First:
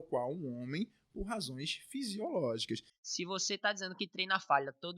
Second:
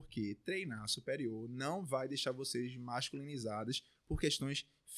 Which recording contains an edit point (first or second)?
first